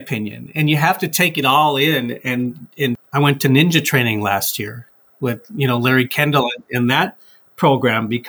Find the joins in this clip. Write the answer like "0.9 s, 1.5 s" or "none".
3.0 s